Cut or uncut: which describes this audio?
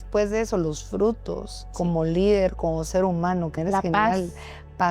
cut